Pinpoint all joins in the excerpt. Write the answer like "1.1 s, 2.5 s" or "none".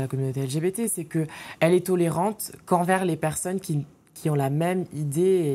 none